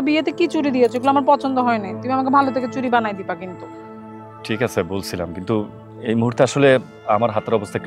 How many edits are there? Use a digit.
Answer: 0